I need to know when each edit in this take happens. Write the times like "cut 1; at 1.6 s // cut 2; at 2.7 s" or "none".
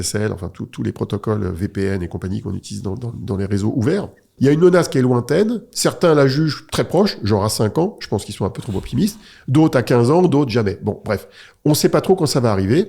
cut 1; at 4.3 s